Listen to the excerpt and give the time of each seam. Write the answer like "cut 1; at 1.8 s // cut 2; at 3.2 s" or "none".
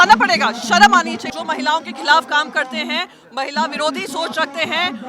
cut 1; at 1.3 s